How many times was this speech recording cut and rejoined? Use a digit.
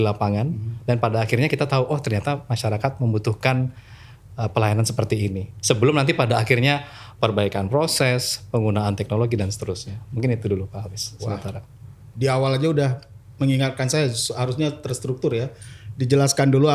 0